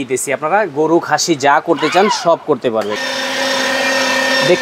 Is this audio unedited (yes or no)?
no